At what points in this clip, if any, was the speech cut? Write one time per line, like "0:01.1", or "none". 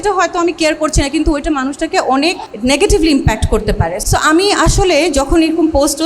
0:02.5
0:03.9